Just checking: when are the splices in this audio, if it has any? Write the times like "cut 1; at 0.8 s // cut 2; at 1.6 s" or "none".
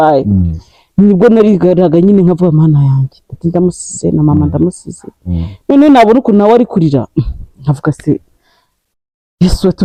none